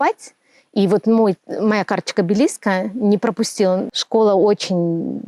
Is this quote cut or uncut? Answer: cut